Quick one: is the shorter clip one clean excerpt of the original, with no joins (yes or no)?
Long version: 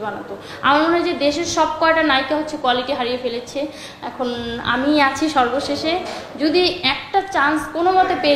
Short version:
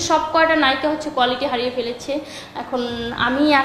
yes